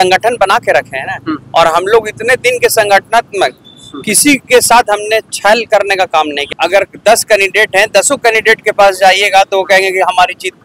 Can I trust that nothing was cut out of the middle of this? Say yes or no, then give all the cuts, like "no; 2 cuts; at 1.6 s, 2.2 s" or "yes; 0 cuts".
no; 1 cut; at 6.4 s